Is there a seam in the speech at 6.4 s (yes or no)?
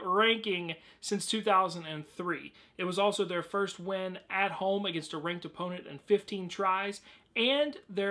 no